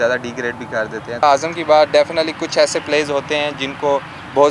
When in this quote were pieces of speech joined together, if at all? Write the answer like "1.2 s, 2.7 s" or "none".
1.2 s

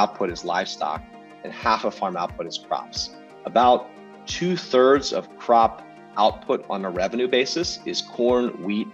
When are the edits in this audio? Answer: none

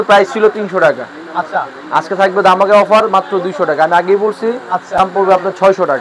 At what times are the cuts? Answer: 5.0 s

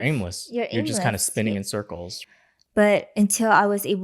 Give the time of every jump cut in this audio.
2.1 s

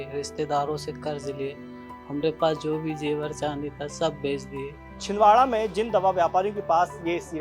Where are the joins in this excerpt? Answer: 5.0 s

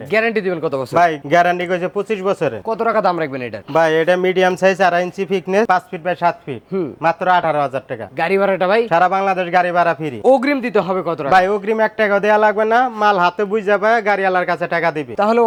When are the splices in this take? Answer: none

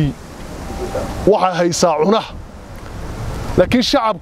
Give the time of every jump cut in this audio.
none

